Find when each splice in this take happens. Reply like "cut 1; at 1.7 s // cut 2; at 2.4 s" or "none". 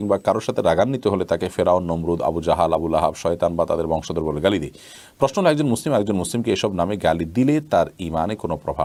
none

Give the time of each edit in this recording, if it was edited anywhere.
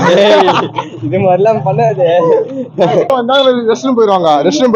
cut 1; at 1.2 s

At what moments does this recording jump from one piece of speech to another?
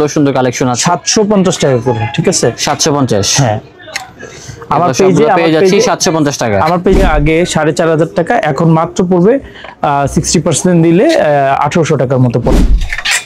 cut 1; at 7.0 s // cut 2; at 12.5 s

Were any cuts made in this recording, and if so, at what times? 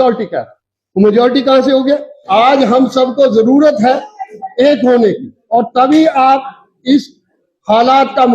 cut 1; at 2.2 s

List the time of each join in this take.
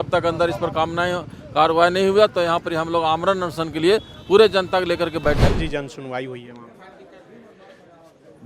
cut 1; at 5.4 s

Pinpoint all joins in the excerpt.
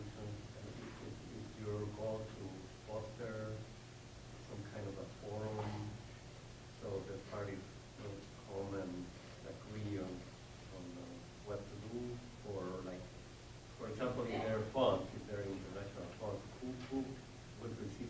none

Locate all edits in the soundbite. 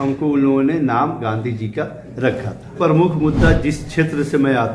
cut 1; at 2.8 s

